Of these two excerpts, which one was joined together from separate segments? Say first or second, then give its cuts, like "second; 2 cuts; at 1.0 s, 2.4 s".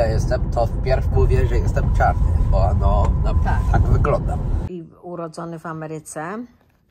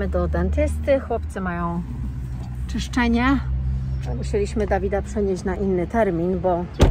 first; 1 cut; at 4.6 s